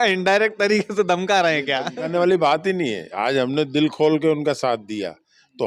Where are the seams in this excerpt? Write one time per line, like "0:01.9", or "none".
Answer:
none